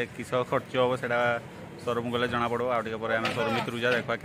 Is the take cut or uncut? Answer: uncut